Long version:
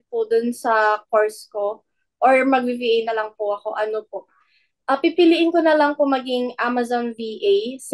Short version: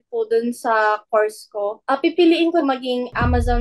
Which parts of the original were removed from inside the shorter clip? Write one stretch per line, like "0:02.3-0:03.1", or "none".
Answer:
0:01.8-0:04.8
0:05.6-0:06.1